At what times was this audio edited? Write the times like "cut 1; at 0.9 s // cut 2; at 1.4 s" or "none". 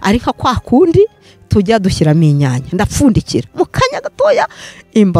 none